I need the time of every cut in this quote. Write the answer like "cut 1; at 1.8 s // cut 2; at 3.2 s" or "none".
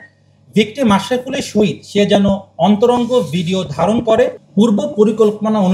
cut 1; at 4.4 s